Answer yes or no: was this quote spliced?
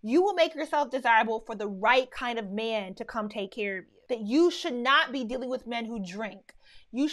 yes